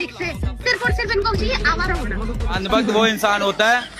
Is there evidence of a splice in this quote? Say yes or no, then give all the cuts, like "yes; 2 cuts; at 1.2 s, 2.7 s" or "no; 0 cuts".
yes; 1 cut; at 2.7 s